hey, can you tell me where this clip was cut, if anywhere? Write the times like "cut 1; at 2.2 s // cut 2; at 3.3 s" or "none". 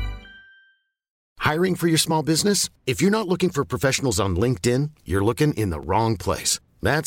cut 1; at 1.1 s